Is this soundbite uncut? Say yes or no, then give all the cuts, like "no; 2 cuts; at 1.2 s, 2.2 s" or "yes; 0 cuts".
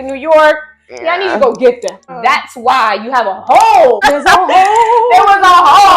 no; 2 cuts; at 2.0 s, 4.0 s